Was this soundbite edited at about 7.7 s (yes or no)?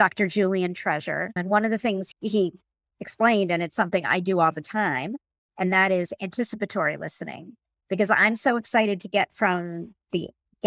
no